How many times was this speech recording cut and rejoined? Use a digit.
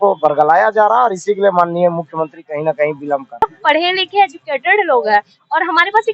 1